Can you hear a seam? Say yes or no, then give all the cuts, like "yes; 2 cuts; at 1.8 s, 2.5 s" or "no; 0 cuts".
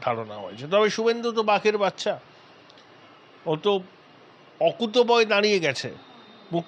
no; 0 cuts